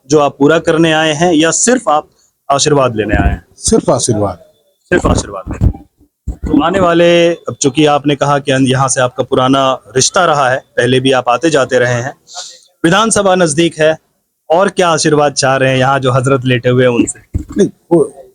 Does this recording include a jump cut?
no; 0 cuts

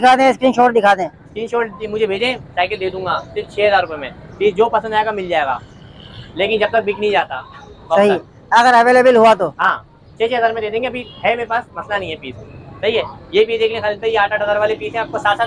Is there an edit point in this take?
no; 0 cuts

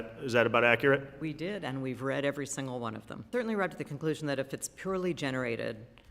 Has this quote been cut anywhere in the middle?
yes; 1 cut; at 3.3 s

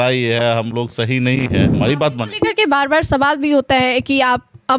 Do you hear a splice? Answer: yes; 1 cut; at 1.7 s

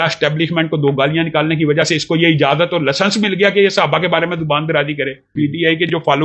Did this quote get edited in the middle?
yes; 1 cut; at 5.3 s

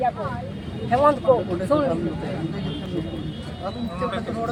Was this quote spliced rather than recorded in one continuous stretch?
no; 0 cuts

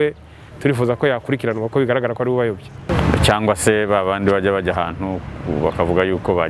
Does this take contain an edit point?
yes; 1 cut; at 2.9 s

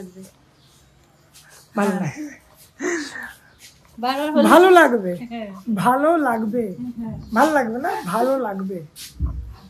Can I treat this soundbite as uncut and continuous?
yes; 0 cuts

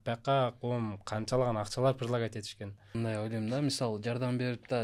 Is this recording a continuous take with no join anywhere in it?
no; 1 cut; at 2.9 s

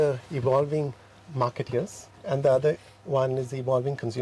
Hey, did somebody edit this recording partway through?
yes; 1 cut; at 2.1 s

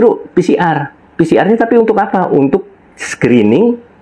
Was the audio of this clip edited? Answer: no; 0 cuts

